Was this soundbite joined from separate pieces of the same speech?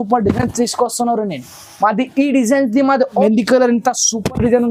yes; 1 cut; at 3.2 s

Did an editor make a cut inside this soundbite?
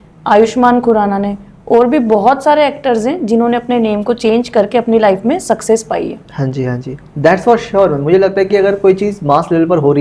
no; 0 cuts

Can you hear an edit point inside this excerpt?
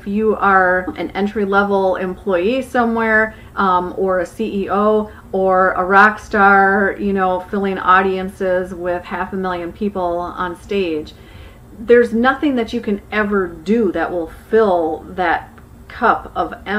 yes; 1 cut; at 1.0 s

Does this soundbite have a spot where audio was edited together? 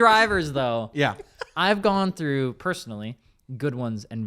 no; 0 cuts

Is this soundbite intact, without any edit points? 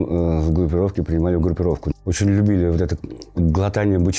no; 1 cut; at 1.8 s

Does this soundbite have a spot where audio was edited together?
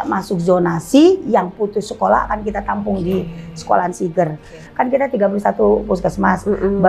yes; 1 cut; at 4.6 s

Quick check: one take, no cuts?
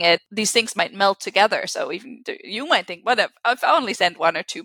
yes; 0 cuts

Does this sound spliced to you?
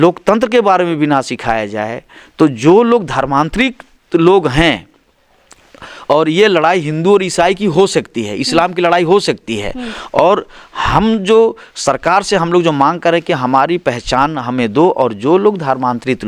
no; 0 cuts

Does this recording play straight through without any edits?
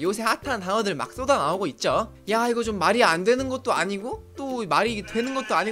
no; 1 cut; at 2.2 s

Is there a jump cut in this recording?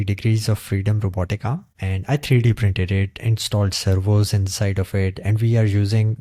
no; 0 cuts

